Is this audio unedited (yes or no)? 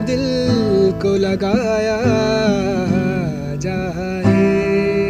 yes